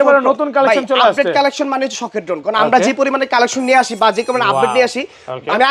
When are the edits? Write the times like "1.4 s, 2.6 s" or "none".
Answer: none

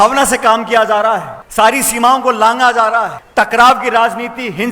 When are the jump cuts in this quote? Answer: 1.4 s, 3.2 s

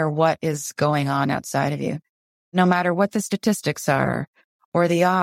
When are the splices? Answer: 2.1 s

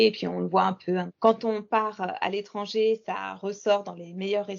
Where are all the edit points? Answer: 1.1 s

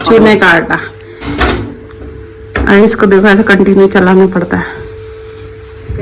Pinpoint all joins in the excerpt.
1.3 s

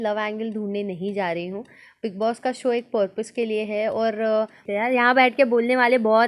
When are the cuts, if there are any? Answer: 4.6 s

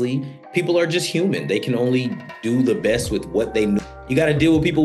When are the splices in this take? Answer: 3.8 s

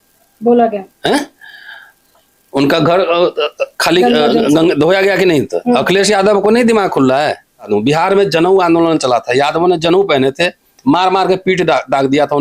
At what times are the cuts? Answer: 7.7 s

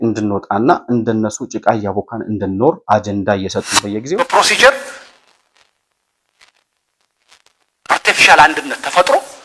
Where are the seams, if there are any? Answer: 4.0 s

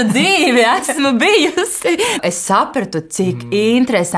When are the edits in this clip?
2.2 s

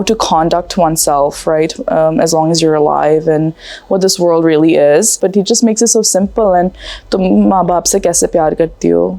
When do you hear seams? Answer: 5.1 s

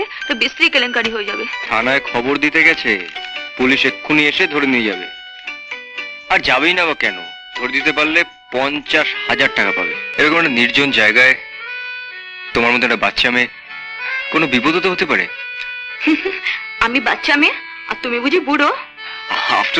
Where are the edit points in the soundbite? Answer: 1.5 s, 10.0 s

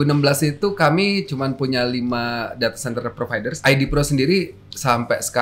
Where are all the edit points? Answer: 3.6 s

